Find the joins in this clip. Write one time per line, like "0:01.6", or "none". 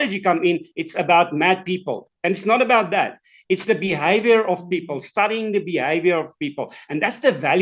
none